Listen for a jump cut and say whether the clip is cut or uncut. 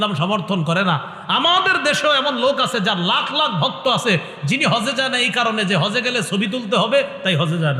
uncut